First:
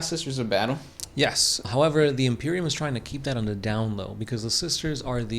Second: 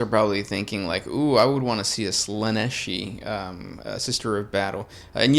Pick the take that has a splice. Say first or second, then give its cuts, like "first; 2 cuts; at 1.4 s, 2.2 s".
first; 1 cut; at 1.7 s